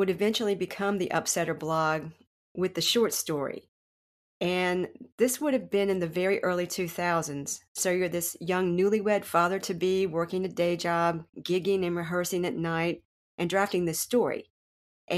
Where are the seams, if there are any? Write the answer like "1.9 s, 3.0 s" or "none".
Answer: none